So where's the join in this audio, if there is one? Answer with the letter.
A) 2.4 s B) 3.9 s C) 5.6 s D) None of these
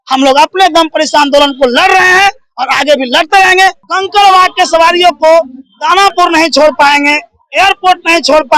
B